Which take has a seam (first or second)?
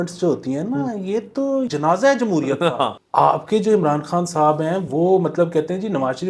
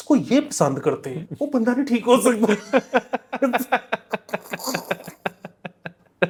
first